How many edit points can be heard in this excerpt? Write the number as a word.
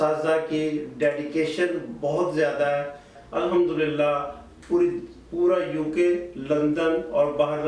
one